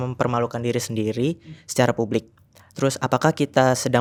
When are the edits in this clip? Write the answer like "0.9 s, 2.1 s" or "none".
none

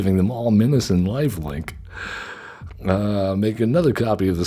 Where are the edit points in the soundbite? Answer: none

